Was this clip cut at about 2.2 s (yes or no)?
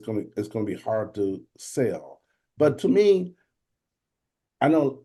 no